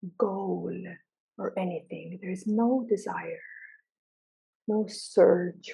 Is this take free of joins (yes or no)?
no